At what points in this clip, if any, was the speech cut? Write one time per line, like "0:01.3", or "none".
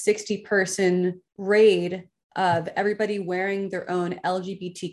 0:01.3